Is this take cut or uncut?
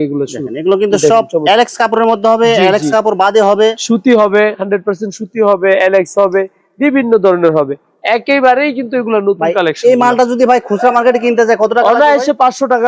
uncut